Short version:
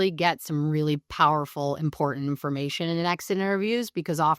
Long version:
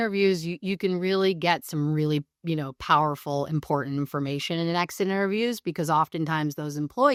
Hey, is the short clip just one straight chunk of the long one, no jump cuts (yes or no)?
no